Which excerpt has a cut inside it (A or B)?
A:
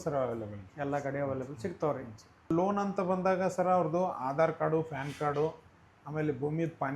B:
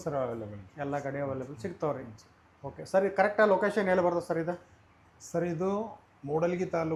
A